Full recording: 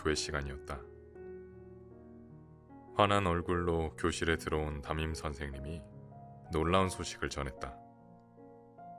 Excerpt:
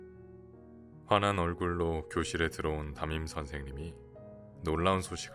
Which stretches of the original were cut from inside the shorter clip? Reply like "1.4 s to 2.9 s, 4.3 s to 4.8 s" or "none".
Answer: 2.4 s to 2.9 s